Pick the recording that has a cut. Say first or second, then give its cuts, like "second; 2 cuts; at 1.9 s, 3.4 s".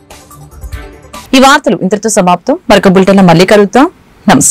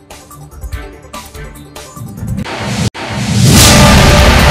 second; 1 cut; at 1.1 s